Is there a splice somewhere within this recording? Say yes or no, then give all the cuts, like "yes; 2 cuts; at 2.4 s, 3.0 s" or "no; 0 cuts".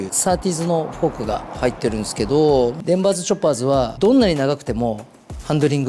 yes; 2 cuts; at 2.8 s, 3.9 s